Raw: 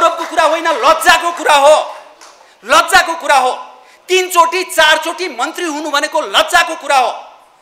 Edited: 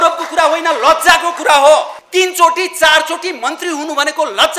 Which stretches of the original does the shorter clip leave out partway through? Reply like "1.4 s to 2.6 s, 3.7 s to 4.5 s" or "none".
2.0 s to 3.9 s